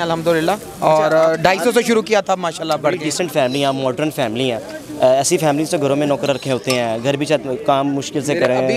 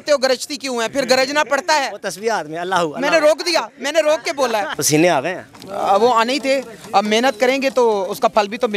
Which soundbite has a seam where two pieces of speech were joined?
second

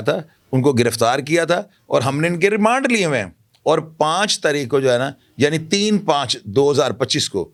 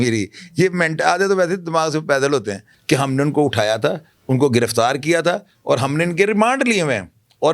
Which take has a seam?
second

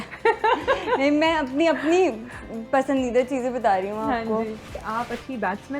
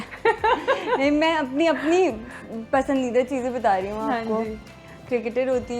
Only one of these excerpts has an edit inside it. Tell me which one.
first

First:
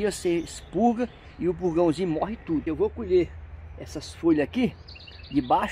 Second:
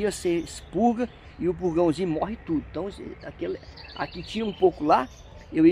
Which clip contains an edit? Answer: first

